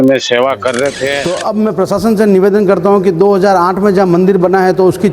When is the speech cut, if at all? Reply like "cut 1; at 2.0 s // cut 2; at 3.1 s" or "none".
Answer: cut 1; at 1.2 s